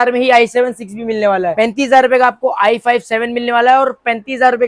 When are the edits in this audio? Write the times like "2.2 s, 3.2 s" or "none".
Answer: none